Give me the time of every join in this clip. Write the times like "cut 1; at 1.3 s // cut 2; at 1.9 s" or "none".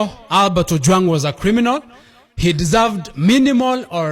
none